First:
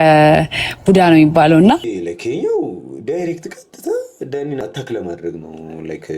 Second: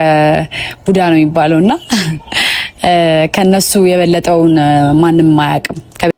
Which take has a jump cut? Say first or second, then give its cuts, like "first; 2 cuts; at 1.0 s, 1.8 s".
first; 2 cuts; at 1.8 s, 4.6 s